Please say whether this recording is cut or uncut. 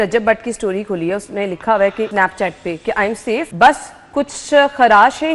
cut